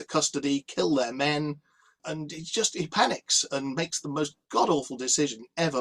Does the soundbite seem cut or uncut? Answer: uncut